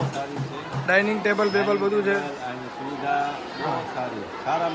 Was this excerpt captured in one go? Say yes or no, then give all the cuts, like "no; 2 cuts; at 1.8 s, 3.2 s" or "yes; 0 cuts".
yes; 0 cuts